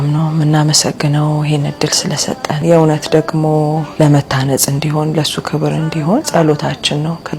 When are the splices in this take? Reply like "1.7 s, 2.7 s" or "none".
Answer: 3.9 s, 6.3 s